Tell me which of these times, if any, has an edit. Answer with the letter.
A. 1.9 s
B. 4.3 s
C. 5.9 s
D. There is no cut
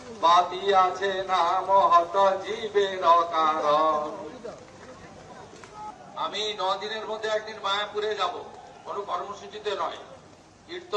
C